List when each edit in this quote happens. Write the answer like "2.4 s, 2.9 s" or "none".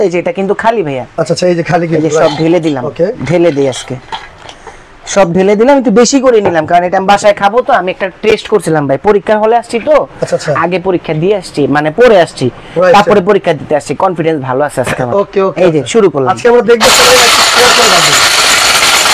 none